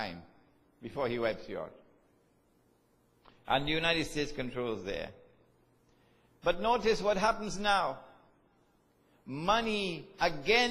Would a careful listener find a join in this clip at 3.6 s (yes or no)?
yes